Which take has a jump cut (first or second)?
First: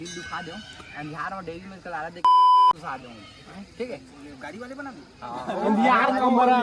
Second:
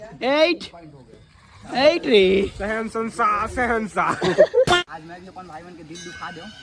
second